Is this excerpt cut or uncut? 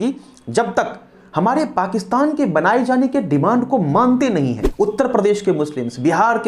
cut